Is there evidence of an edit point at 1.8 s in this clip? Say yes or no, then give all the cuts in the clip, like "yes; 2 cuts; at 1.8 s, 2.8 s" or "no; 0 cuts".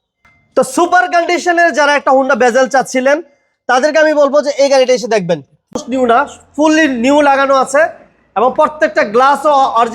no; 1 cut; at 5.9 s